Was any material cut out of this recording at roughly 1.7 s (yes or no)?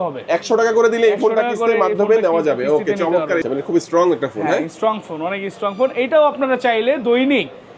no